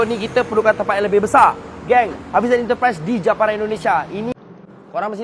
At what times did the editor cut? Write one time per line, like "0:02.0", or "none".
0:04.3

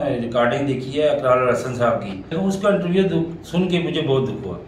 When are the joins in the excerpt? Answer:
0:02.3

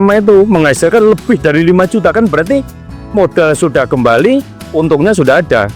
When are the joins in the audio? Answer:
none

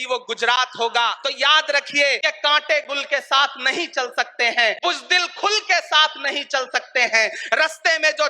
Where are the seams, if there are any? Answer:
0:01.2
0:02.2
0:04.8

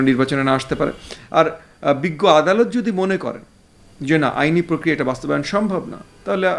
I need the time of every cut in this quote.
none

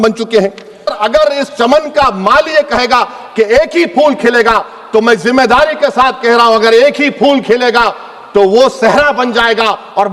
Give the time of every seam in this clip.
0:00.9

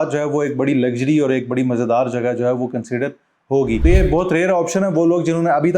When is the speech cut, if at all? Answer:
0:03.8

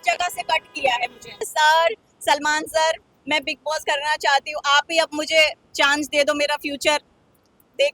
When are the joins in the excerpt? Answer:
0:01.4

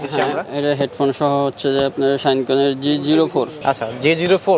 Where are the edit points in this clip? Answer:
none

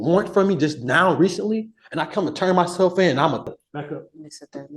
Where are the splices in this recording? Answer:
0:03.5

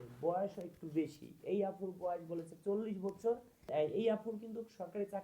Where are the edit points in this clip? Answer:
0:03.7

